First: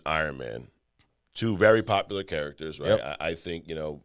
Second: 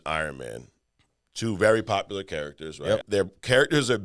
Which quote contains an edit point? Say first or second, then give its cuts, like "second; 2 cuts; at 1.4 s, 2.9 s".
second; 1 cut; at 3.0 s